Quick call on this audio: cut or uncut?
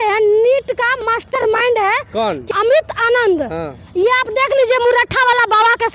cut